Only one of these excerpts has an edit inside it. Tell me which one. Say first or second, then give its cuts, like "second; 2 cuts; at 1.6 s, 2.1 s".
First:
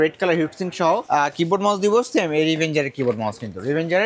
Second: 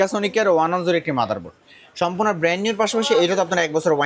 first; 1 cut; at 1.0 s